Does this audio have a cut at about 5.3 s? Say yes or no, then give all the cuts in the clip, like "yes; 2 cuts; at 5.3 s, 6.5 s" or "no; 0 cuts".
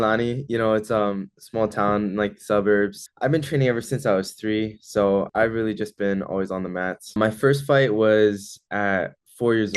yes; 3 cuts; at 3.0 s, 5.3 s, 7.2 s